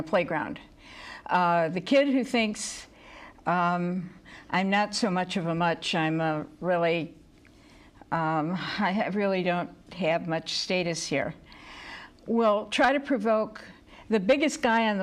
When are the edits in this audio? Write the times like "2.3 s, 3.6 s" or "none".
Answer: 1.3 s